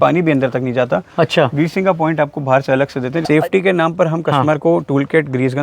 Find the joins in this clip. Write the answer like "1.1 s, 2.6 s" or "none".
3.3 s